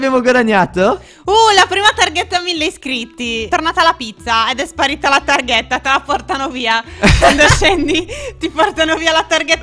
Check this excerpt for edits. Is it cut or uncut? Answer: cut